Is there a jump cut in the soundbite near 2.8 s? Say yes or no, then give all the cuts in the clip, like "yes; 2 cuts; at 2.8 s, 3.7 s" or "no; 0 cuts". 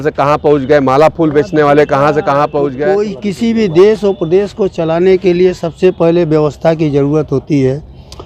yes; 1 cut; at 2.8 s